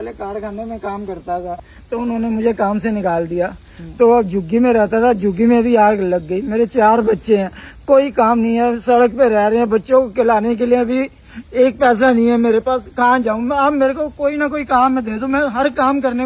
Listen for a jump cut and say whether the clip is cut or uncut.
cut